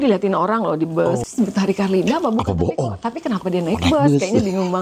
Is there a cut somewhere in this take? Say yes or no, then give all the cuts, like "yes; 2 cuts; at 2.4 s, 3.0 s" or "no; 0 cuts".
yes; 1 cut; at 1.3 s